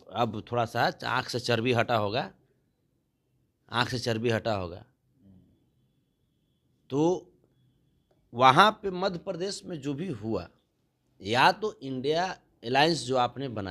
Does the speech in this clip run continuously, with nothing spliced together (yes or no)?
yes